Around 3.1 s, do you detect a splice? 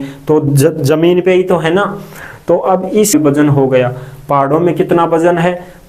yes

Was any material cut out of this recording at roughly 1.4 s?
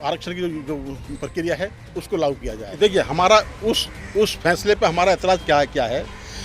no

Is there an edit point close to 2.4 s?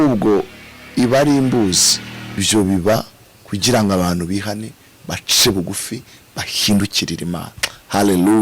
yes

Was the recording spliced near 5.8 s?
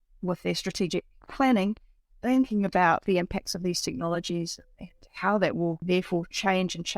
yes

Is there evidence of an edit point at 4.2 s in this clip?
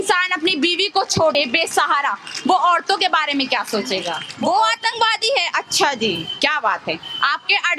yes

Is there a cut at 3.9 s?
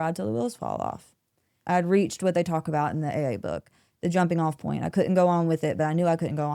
no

